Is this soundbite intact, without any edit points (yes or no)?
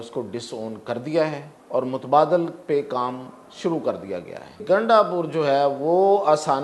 no